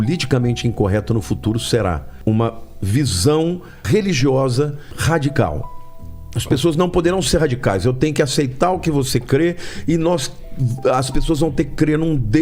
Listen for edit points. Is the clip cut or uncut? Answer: cut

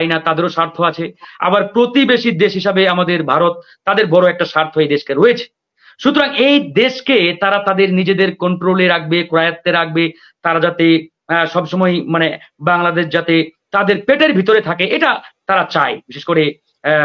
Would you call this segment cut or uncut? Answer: uncut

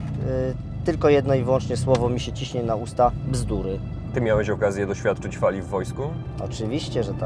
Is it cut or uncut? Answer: cut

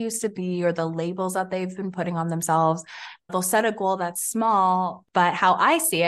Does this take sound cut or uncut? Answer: cut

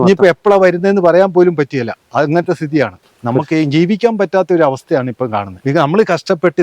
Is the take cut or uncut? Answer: cut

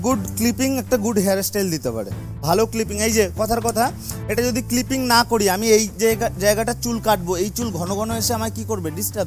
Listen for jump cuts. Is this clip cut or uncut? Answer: uncut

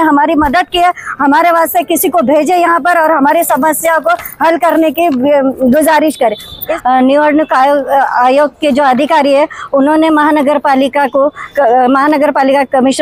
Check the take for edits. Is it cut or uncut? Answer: cut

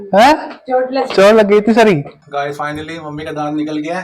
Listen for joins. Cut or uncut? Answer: cut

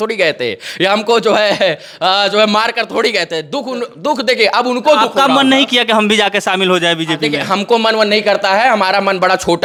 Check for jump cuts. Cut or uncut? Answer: uncut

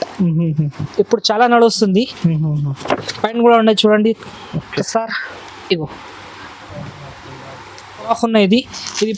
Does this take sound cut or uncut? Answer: cut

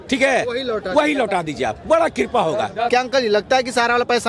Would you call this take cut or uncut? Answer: cut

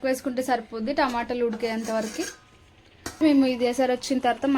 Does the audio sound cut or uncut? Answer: cut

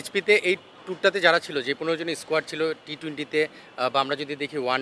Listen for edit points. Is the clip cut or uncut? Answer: uncut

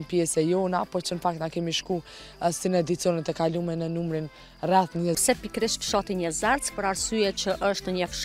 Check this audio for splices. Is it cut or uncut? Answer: cut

